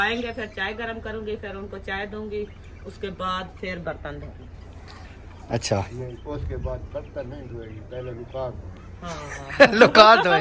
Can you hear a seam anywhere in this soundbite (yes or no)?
yes